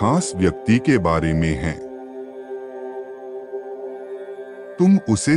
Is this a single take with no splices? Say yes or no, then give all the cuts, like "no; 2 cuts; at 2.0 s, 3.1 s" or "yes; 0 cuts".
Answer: no; 2 cuts; at 2.0 s, 4.5 s